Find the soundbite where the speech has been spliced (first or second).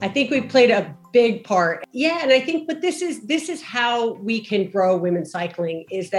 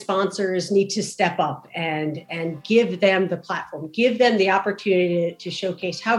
first